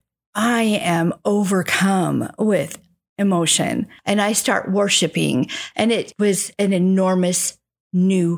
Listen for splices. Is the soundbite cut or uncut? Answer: cut